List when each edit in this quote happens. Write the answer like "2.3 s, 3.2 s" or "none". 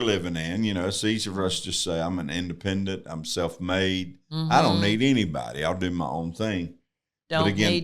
none

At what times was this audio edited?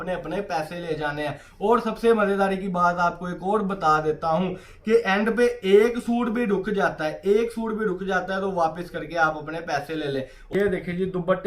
10.5 s

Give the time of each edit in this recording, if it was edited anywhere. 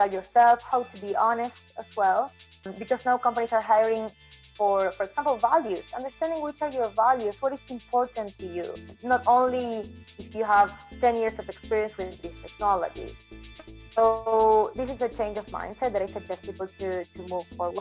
2.7 s, 8.9 s

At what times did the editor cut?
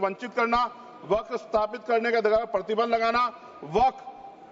none

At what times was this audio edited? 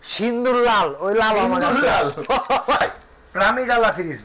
2.8 s

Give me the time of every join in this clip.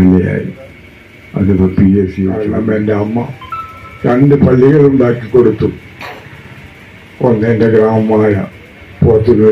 2.4 s

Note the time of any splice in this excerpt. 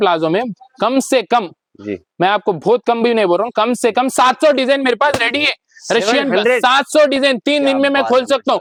none

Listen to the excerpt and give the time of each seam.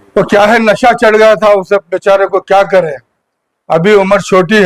none

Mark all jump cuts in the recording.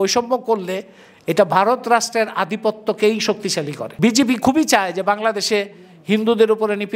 3.8 s

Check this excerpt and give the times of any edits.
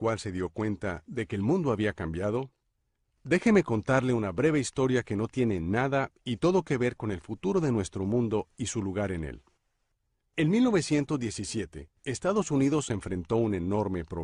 none

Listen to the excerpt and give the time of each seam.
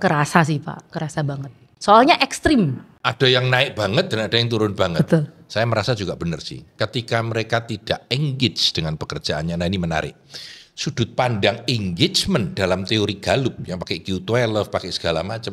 2.9 s

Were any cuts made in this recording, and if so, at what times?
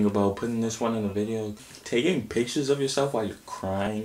1.6 s

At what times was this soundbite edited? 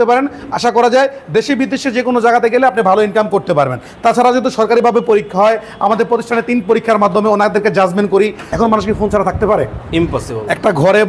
8.4 s

